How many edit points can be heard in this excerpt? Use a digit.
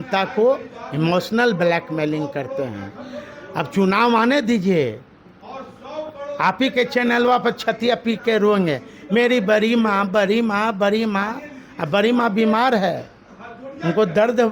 0